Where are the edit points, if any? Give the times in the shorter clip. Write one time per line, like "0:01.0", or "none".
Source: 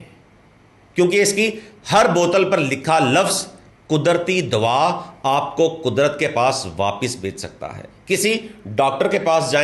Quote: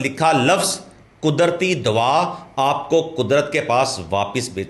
none

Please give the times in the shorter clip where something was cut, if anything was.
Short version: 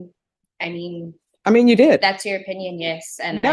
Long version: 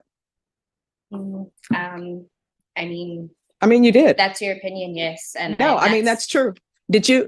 none

